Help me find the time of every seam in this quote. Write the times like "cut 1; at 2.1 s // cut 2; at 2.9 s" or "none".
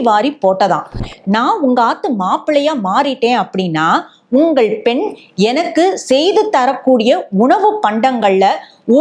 cut 1; at 1.1 s

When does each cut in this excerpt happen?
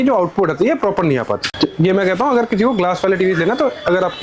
none

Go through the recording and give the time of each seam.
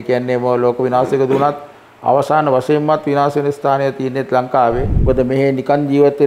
cut 1; at 4.9 s

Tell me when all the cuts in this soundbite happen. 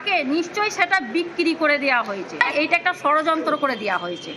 cut 1; at 2.4 s

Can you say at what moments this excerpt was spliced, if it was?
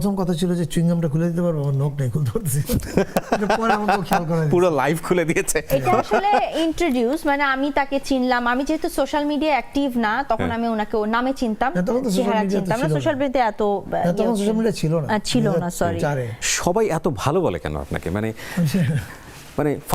none

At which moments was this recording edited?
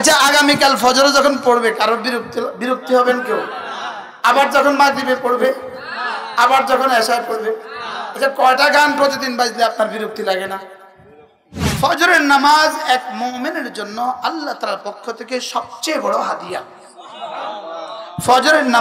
cut 1; at 11.7 s

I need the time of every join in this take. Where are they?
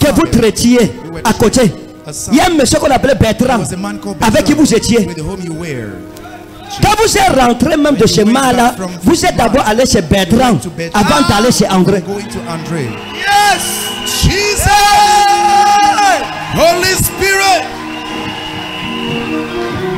none

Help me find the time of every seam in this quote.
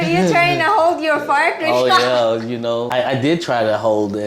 cut 1; at 2.9 s

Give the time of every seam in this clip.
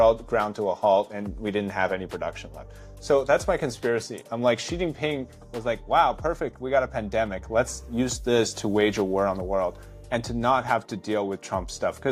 none

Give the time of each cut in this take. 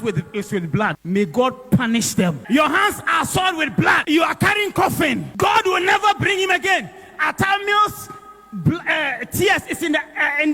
cut 1; at 1.0 s // cut 2; at 2.4 s // cut 3; at 4.0 s // cut 4; at 5.3 s

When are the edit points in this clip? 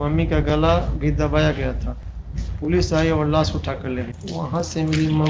cut 1; at 4.2 s

